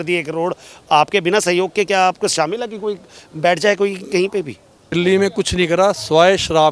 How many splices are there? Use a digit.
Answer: 1